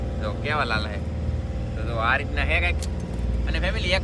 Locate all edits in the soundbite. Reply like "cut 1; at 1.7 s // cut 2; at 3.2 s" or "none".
none